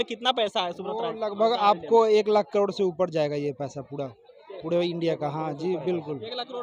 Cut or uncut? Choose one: uncut